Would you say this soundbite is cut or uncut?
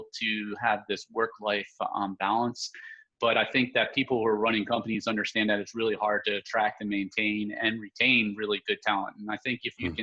uncut